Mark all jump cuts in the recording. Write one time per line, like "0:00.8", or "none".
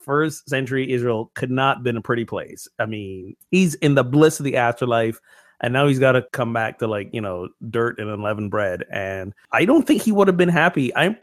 0:03.3
0:06.3
0:09.4